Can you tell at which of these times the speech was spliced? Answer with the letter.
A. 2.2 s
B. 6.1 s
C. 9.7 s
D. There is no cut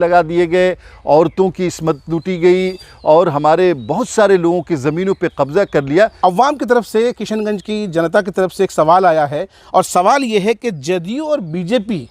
B